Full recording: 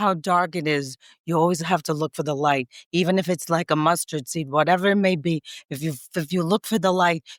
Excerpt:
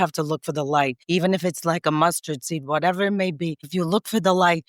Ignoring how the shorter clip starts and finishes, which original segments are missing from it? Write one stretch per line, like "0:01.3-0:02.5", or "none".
0:02.7-0:02.8
0:05.5-0:06.2